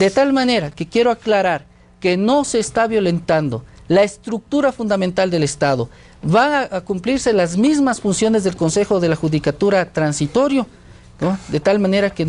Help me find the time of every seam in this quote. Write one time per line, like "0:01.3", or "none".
0:07.0